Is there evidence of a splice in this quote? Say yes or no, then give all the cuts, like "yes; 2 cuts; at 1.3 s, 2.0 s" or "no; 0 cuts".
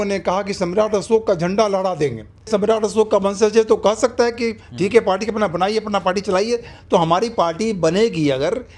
yes; 1 cut; at 2.5 s